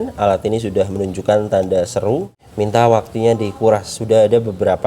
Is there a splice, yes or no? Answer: yes